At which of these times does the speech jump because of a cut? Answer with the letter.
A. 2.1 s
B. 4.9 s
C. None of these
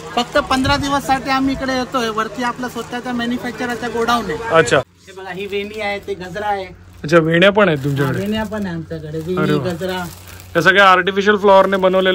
B